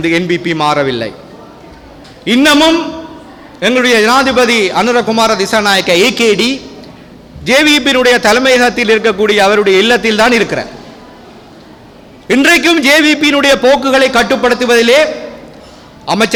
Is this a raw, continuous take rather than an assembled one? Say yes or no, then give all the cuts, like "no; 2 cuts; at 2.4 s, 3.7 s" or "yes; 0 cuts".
yes; 0 cuts